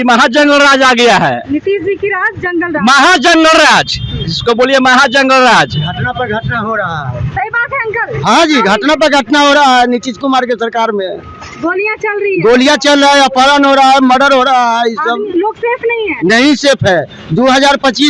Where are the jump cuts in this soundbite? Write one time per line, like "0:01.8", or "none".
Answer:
none